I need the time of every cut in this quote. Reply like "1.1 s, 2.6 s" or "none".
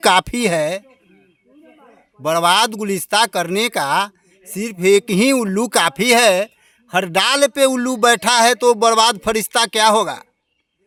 none